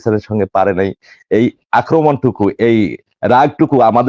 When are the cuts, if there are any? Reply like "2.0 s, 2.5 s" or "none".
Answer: none